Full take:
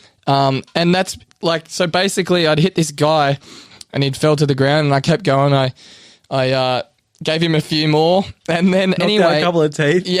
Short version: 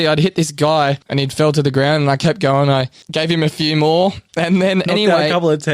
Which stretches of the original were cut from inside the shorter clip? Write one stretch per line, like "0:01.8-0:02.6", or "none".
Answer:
0:03.4-0:03.9
0:05.8-0:07.1